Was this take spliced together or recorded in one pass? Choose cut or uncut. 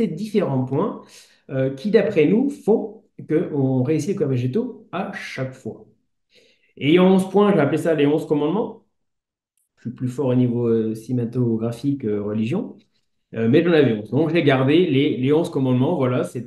uncut